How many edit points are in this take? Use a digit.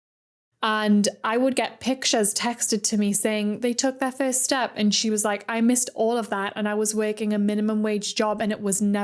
0